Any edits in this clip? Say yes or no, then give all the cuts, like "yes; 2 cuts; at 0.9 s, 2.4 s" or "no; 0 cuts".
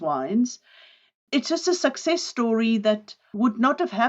yes; 1 cut; at 1.1 s